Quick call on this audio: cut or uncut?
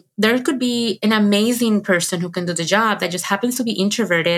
cut